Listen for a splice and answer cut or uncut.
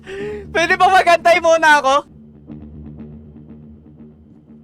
cut